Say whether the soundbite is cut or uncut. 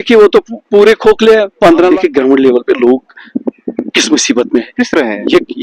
cut